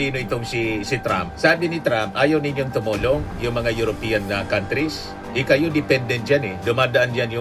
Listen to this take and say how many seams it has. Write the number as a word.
zero